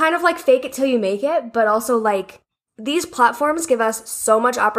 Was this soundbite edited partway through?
no; 0 cuts

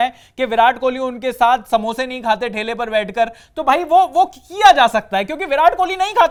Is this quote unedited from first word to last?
yes; 0 cuts

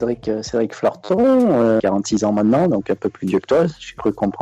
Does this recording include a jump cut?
yes; 1 cut; at 1.8 s

